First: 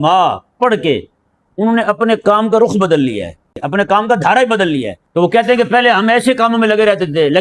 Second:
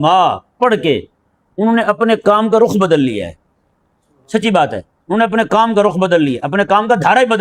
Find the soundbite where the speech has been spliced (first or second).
first